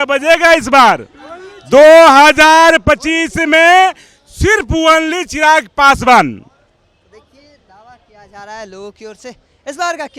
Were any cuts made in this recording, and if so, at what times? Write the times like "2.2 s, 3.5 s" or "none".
none